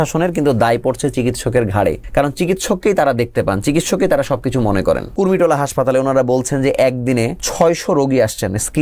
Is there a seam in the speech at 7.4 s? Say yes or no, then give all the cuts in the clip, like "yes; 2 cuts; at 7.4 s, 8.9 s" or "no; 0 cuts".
yes; 3 cuts; at 2.0 s, 5.1 s, 7.4 s